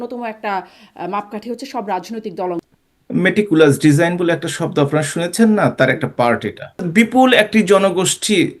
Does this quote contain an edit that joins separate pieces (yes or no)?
yes